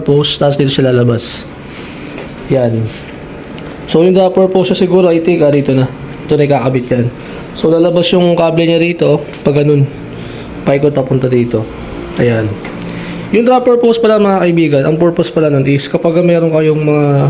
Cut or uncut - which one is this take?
uncut